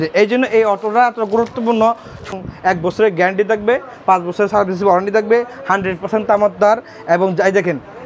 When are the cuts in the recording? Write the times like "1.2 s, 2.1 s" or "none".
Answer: 2.3 s